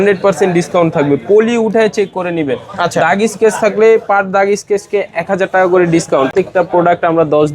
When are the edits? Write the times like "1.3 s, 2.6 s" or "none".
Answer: 6.3 s